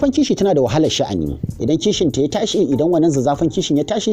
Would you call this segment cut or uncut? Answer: cut